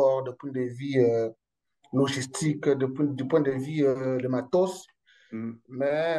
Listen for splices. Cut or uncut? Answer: uncut